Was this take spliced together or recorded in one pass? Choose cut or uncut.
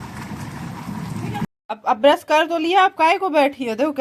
cut